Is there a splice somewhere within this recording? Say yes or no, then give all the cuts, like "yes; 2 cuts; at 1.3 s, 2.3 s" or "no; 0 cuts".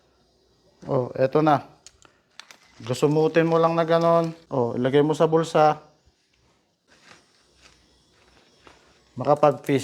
yes; 2 cuts; at 4.4 s, 6.9 s